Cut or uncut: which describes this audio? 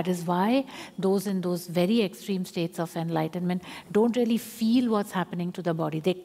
uncut